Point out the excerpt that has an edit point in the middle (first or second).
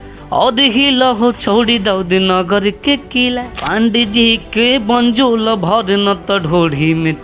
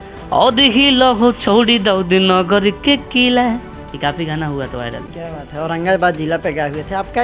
first